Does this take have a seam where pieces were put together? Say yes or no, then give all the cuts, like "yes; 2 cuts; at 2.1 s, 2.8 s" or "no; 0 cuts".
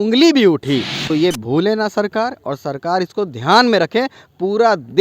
yes; 1 cut; at 1.0 s